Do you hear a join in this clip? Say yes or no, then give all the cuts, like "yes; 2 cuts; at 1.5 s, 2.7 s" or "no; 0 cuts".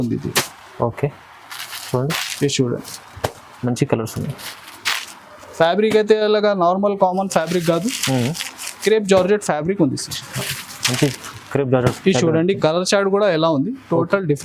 no; 0 cuts